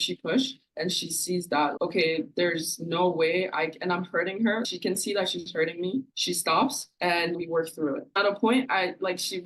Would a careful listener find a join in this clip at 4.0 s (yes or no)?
no